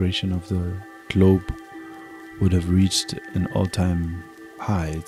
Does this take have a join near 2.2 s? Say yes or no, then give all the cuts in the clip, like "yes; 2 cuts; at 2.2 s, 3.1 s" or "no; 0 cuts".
no; 0 cuts